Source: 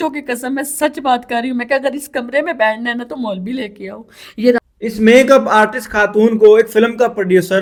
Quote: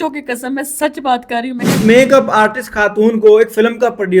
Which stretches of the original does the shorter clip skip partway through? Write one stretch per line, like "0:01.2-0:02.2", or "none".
0:01.6-0:04.8